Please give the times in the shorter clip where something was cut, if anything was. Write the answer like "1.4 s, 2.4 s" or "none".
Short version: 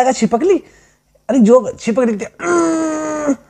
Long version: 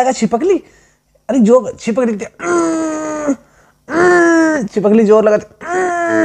none